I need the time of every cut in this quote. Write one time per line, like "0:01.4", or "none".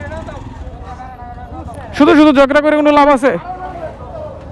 none